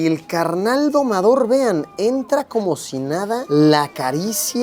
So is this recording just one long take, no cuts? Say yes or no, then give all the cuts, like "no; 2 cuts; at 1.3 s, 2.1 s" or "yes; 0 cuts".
yes; 0 cuts